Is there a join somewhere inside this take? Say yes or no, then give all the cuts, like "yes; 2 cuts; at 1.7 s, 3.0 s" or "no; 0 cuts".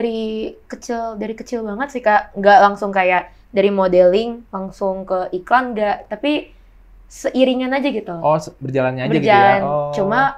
no; 0 cuts